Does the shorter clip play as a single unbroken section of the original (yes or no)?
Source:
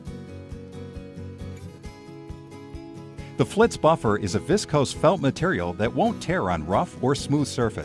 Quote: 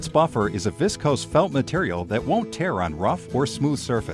yes